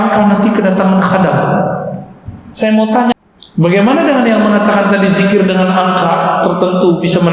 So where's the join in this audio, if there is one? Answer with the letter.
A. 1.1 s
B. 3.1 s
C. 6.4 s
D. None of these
B